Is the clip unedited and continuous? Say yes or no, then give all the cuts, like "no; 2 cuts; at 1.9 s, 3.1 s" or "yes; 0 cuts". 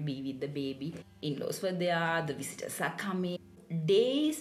no; 2 cuts; at 1.0 s, 3.5 s